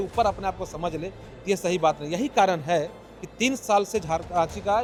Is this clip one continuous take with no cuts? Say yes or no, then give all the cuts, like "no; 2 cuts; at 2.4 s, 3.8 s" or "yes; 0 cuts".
yes; 0 cuts